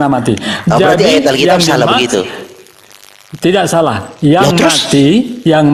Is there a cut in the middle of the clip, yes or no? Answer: no